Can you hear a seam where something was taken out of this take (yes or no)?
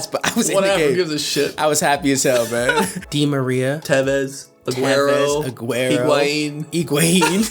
yes